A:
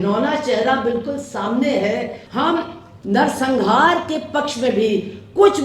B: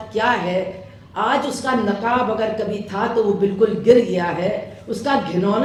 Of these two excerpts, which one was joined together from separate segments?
A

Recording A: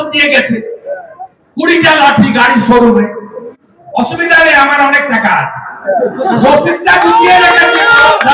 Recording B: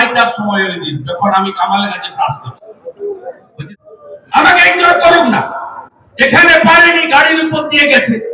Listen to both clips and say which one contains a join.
B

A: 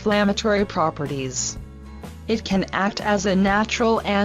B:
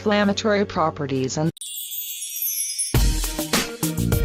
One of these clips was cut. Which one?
A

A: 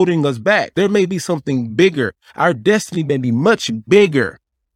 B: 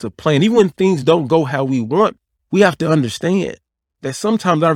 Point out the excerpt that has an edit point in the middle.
B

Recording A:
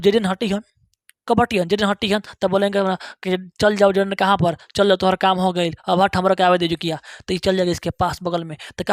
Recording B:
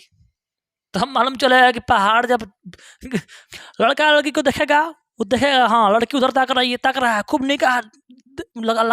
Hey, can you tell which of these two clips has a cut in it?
B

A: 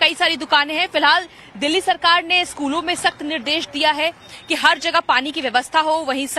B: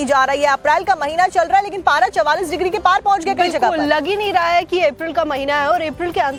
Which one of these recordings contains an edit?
A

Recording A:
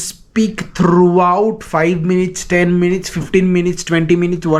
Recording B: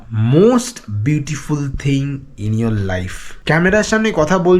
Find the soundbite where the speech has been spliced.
B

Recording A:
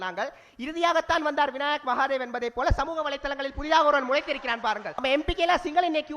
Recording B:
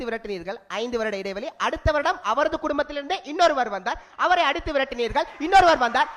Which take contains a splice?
A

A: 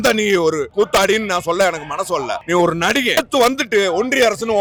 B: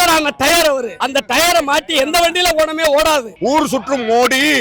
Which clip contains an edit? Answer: B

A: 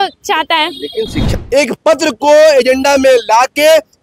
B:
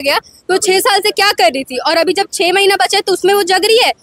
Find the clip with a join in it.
A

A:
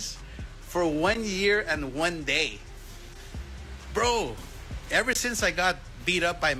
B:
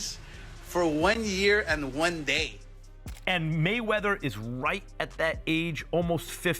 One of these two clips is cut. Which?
B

